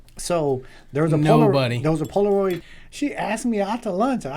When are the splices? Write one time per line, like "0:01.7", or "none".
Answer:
0:02.6